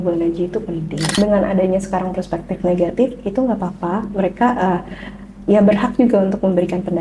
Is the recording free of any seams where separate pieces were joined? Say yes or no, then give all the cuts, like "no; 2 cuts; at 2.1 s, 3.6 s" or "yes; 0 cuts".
no; 1 cut; at 1.1 s